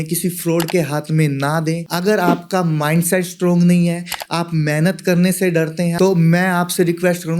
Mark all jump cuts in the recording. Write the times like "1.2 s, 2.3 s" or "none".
1.9 s, 5.9 s